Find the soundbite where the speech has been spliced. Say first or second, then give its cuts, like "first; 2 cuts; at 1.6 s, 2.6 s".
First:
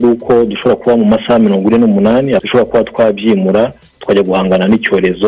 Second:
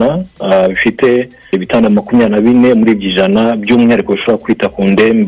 first; 2 cuts; at 2.4 s, 3.9 s